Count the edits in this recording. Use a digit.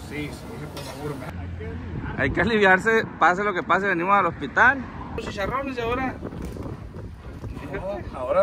2